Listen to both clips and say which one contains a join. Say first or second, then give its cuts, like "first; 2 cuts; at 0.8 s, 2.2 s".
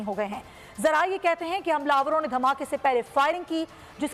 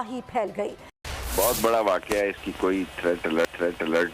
second; 1 cut; at 1.0 s